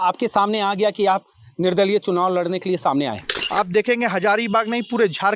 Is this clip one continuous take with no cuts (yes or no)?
no